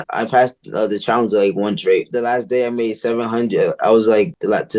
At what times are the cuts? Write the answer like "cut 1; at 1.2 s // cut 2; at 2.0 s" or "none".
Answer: none